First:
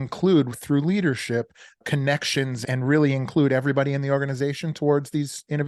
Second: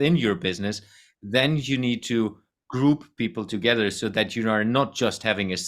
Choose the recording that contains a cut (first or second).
first